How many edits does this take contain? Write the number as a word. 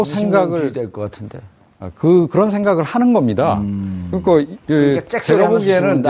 one